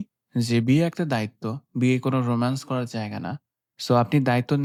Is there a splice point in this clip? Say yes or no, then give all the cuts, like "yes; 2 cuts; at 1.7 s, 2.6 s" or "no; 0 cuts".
no; 0 cuts